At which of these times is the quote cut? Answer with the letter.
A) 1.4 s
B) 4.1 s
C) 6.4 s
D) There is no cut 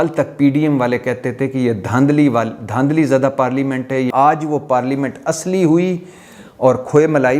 B